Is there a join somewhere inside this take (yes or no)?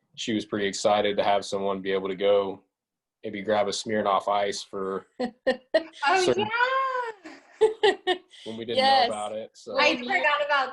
no